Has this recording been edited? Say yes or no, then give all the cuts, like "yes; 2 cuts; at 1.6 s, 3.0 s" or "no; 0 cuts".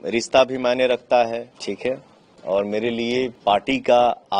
yes; 2 cuts; at 1.5 s, 3.4 s